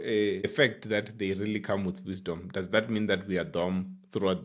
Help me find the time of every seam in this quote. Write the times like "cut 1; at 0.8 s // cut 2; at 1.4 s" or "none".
none